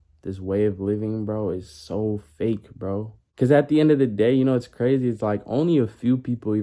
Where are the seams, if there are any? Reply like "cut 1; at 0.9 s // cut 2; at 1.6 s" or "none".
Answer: cut 1; at 3.2 s